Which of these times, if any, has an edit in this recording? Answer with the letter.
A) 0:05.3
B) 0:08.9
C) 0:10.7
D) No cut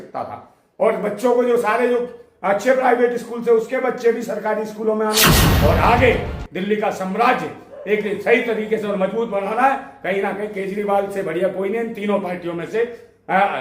A